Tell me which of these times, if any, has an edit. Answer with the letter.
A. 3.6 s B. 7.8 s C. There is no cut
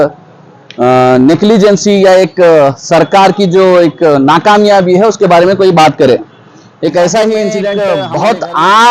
B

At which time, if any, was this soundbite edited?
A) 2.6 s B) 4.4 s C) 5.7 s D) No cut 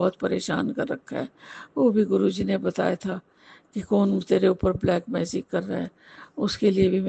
D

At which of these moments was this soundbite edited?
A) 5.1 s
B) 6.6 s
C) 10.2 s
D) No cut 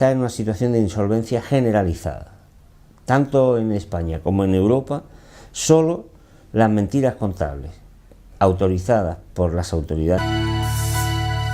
D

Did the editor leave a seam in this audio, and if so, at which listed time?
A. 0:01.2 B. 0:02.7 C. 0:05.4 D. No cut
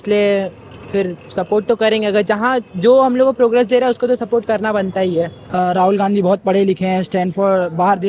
C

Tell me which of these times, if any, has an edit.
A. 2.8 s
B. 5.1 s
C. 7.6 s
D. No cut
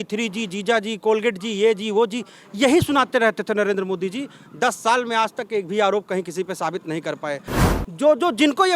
C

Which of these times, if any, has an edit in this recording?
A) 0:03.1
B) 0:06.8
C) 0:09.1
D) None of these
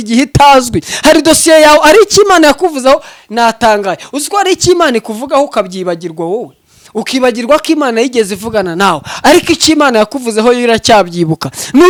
D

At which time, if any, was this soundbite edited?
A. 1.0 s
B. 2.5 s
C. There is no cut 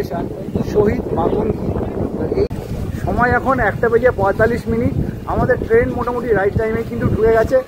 B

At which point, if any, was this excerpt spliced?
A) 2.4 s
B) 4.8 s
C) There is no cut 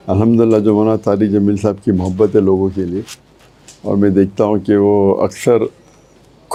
C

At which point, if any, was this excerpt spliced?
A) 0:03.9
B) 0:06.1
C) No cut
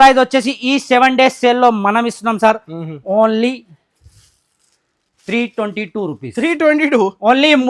C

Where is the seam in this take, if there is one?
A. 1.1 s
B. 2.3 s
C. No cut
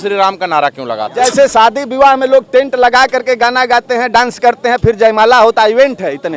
A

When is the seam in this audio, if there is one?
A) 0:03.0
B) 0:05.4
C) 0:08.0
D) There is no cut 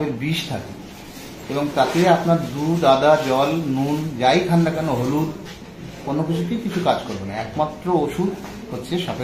D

